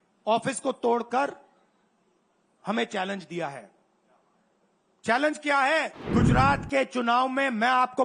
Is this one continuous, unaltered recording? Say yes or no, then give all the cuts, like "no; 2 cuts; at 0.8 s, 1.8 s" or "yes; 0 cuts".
no; 1 cut; at 6.0 s